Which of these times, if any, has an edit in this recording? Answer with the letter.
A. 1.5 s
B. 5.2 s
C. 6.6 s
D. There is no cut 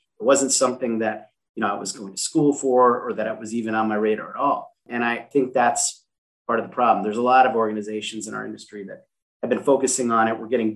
B